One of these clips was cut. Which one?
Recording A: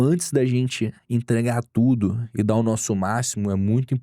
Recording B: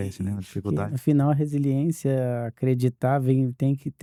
A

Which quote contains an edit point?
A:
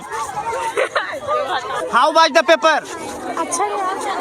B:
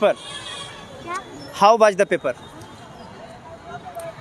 A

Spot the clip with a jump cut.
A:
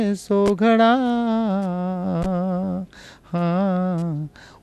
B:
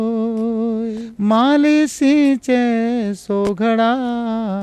B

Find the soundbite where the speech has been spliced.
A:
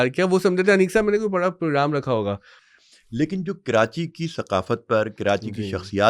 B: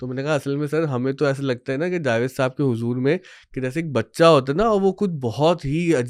A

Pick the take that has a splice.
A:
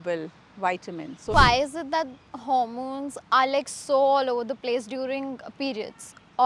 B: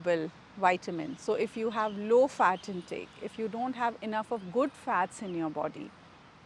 A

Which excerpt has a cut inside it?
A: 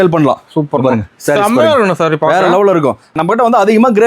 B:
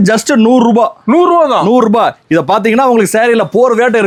A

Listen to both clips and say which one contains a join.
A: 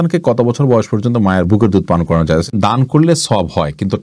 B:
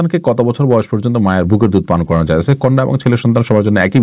A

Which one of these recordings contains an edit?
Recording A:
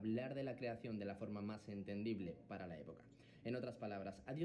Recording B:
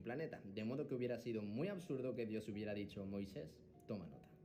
A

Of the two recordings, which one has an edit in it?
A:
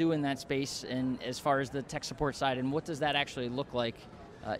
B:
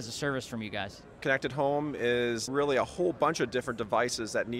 B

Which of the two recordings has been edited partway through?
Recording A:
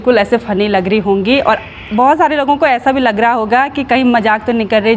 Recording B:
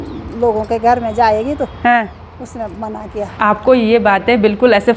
B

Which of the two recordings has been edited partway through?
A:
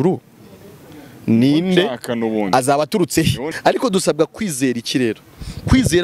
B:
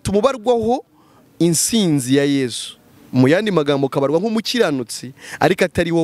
A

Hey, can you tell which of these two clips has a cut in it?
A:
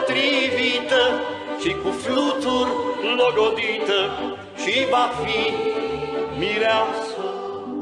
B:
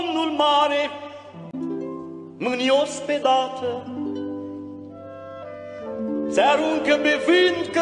A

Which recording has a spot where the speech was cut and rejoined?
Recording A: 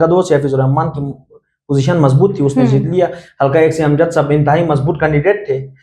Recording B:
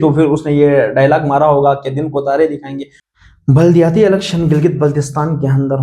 B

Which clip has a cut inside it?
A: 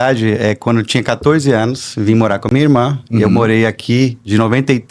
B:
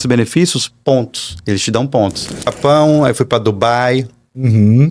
B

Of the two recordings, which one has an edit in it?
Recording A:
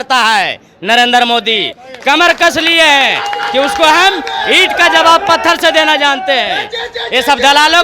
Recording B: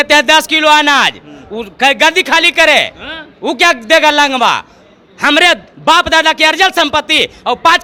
A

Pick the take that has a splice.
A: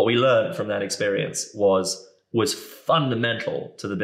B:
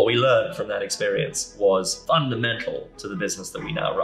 B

